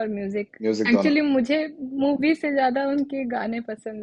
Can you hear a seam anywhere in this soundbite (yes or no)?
no